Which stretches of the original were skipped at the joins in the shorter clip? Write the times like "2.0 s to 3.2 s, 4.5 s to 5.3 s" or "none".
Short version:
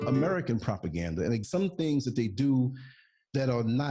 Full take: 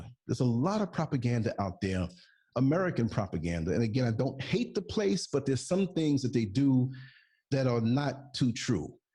3.9 s to 5.6 s